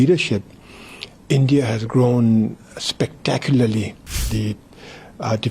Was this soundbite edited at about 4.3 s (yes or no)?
yes